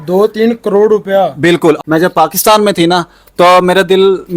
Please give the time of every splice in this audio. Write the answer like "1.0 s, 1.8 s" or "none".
1.8 s